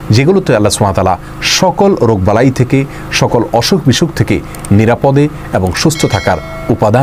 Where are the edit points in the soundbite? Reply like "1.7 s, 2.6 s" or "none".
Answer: none